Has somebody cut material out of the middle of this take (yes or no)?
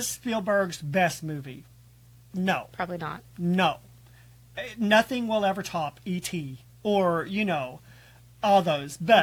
no